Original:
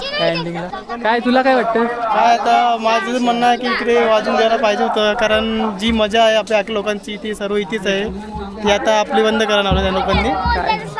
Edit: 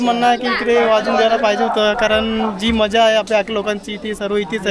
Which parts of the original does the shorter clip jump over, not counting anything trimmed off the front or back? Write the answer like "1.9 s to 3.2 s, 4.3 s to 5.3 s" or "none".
none